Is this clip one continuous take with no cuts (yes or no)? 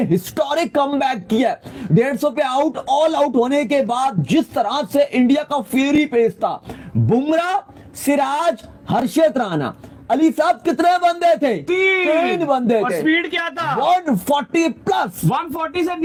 yes